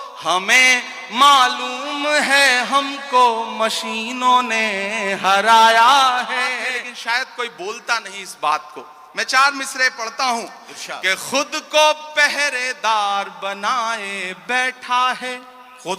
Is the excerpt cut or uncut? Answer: cut